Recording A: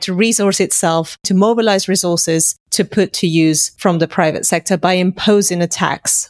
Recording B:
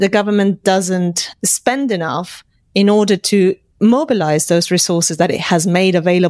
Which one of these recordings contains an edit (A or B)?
A